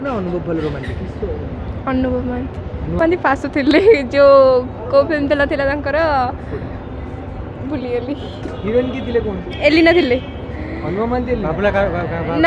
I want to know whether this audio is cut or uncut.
cut